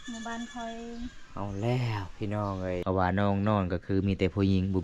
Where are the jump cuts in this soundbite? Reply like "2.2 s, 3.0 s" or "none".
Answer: 2.8 s